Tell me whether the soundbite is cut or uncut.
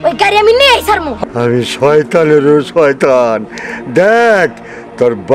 cut